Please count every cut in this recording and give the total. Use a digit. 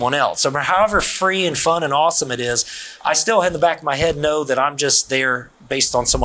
0